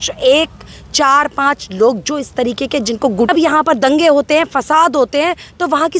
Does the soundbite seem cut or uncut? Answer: cut